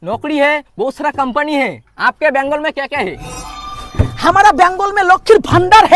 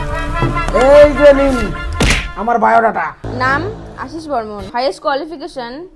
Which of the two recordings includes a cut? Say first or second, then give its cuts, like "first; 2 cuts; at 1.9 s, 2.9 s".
second; 2 cuts; at 3.2 s, 4.6 s